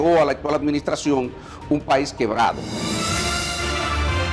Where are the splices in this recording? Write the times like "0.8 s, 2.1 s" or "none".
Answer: 2.7 s